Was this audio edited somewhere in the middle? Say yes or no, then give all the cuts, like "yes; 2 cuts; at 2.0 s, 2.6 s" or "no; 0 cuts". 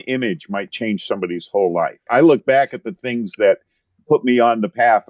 yes; 1 cut; at 2.1 s